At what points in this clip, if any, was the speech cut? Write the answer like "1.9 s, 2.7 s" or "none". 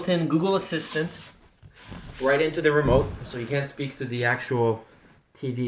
none